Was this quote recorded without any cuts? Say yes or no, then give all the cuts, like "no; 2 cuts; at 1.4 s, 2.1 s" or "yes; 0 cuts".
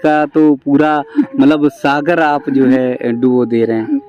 yes; 0 cuts